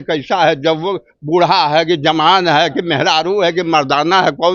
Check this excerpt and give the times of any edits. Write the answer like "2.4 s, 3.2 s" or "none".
none